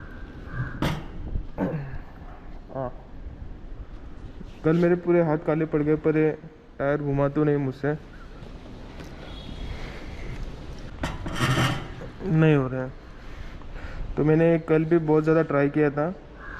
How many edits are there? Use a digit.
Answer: 1